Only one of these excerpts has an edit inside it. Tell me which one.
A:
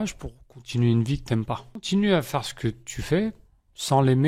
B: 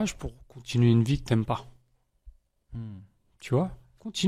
A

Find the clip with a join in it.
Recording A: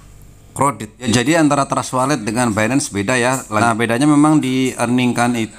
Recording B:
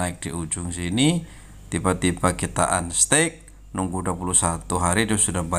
A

